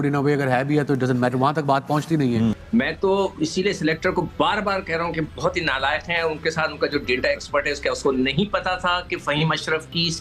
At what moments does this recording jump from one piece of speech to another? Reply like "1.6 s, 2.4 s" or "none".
2.6 s